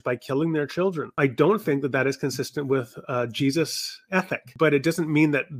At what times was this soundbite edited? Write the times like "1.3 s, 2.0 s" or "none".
1.1 s, 4.4 s